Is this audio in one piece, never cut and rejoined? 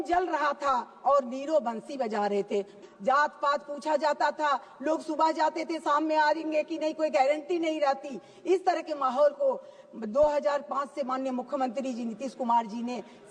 no; 1 cut; at 2.8 s

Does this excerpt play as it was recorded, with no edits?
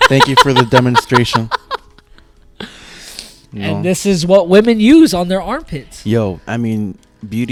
yes; 0 cuts

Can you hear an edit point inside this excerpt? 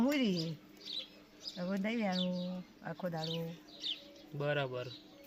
no; 0 cuts

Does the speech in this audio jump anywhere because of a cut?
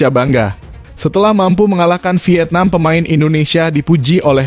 no; 0 cuts

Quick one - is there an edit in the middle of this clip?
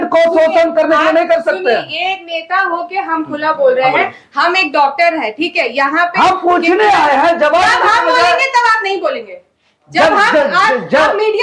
no; 0 cuts

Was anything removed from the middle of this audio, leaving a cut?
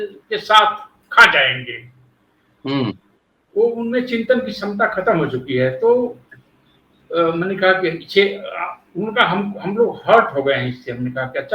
no; 0 cuts

